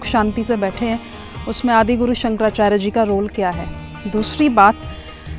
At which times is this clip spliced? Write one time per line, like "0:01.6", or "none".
none